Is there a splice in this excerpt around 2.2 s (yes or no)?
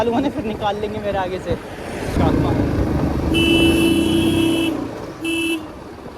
yes